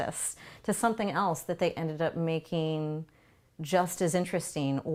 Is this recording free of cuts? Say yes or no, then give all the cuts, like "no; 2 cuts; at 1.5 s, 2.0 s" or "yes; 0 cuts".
yes; 0 cuts